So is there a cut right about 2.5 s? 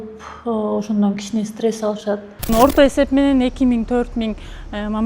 yes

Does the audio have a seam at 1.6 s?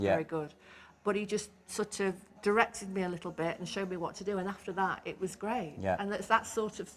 no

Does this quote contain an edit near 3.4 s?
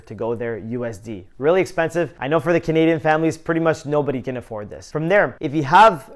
no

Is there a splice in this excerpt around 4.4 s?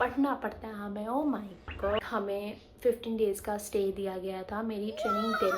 no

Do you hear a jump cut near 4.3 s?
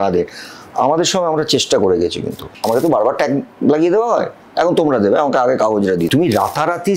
no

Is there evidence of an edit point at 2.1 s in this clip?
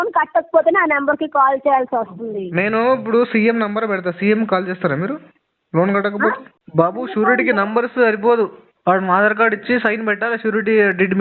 no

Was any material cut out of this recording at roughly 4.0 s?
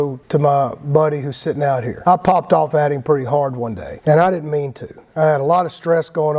no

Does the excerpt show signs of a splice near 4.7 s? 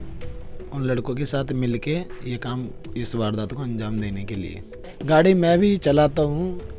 yes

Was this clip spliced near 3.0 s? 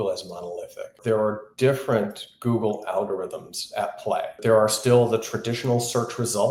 no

